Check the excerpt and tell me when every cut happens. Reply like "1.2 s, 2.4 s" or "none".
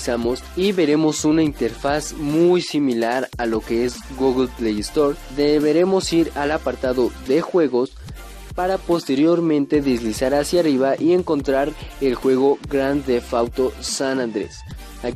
10.1 s

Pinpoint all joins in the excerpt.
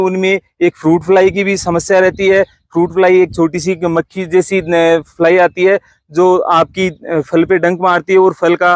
none

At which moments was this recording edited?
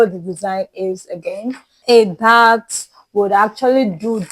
1.7 s

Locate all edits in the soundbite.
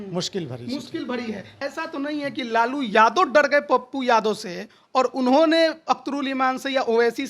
1.6 s

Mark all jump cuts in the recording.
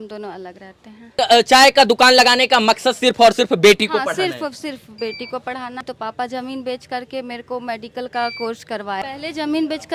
1.1 s, 5.8 s, 9.1 s

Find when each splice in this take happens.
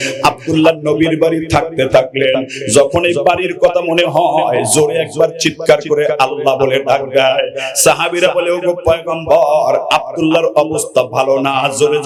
none

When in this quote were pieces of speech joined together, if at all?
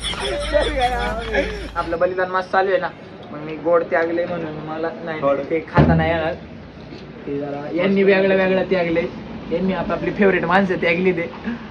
1.8 s

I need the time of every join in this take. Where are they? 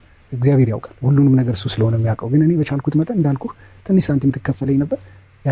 none

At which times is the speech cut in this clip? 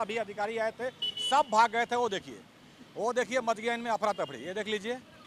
none

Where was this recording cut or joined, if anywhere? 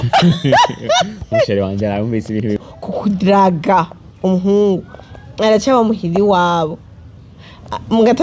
2.7 s

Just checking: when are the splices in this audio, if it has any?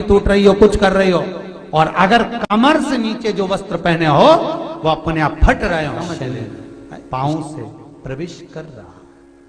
6.1 s

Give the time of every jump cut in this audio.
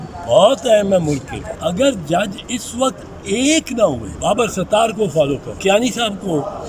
1.4 s, 4.1 s, 5.5 s

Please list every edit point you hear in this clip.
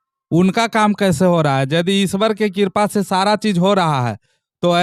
none

